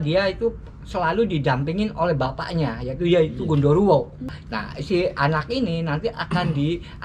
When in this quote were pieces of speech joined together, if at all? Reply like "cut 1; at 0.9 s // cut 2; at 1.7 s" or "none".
cut 1; at 4.3 s

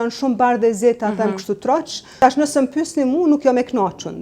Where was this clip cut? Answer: cut 1; at 2.0 s

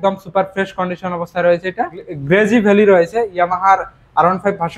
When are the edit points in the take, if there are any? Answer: cut 1; at 2.1 s

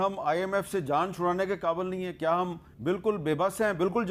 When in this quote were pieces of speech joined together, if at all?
cut 1; at 2.7 s

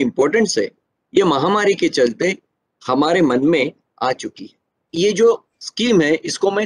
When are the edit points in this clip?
cut 1; at 4.8 s

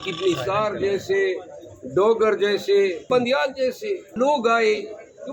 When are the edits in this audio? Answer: cut 1; at 3.0 s // cut 2; at 4.1 s

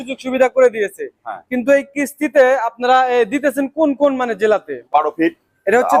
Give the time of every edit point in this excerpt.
cut 1; at 4.8 s

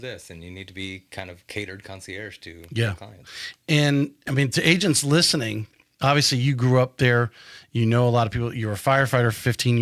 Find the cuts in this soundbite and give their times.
none

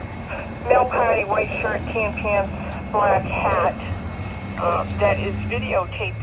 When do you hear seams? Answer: none

